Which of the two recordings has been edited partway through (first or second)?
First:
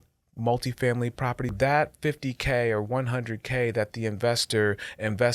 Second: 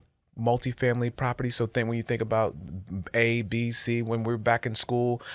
first